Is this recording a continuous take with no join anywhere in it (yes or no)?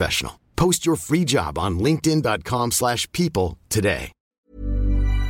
no